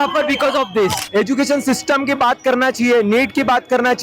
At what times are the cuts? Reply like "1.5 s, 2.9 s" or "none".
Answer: 1.0 s